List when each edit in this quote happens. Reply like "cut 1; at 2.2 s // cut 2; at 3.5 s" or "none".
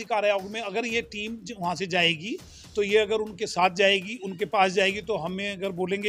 none